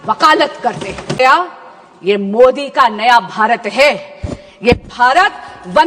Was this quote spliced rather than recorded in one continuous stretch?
yes; 1 cut; at 1.2 s

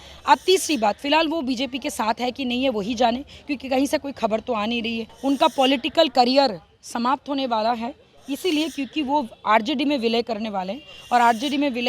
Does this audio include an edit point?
yes; 1 cut; at 5.0 s

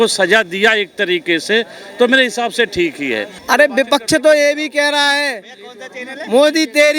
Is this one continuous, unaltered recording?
no; 1 cut; at 3.3 s

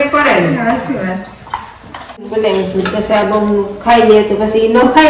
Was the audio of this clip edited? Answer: yes; 1 cut; at 2.3 s

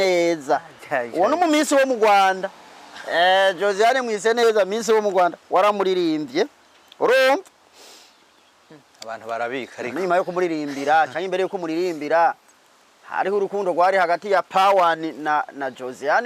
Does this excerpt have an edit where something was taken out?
no; 0 cuts

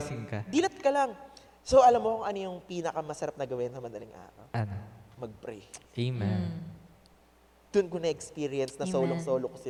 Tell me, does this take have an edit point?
no; 0 cuts

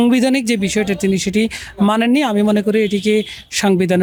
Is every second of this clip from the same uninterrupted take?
yes; 0 cuts

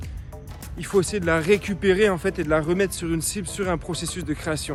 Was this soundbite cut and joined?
no; 0 cuts

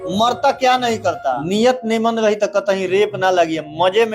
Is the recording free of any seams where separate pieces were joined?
no; 1 cut; at 1.4 s

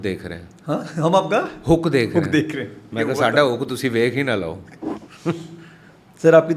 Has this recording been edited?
no; 0 cuts

